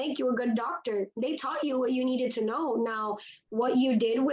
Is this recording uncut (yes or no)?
yes